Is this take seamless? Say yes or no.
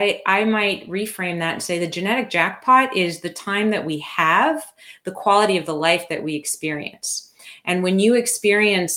yes